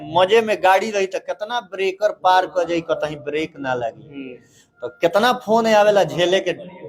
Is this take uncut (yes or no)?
yes